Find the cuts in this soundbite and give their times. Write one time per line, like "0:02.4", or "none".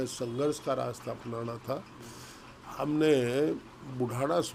none